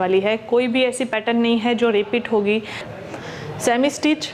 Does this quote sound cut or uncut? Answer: cut